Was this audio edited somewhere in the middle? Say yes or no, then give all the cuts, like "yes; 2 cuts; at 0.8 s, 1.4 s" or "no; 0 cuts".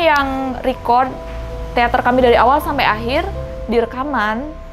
no; 0 cuts